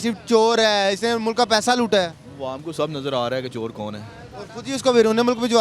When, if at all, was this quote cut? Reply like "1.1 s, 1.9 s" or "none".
none